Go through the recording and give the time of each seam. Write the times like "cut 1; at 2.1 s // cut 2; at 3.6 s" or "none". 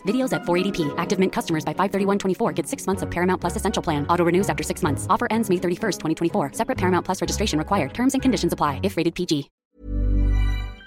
cut 1; at 9.6 s